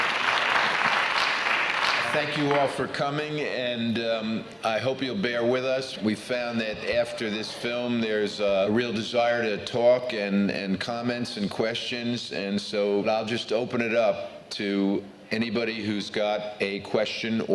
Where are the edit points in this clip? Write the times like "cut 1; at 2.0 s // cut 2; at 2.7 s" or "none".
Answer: cut 1; at 15.5 s